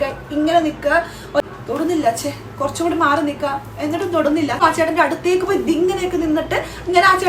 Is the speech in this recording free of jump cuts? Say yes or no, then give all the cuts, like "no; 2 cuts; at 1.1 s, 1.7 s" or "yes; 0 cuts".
no; 2 cuts; at 1.4 s, 4.6 s